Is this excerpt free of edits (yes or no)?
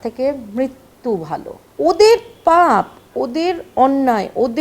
no